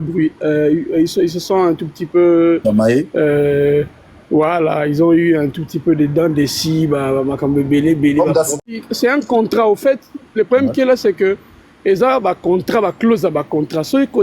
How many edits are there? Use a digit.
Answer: 1